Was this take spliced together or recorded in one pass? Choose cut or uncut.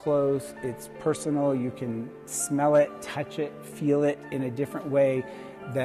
uncut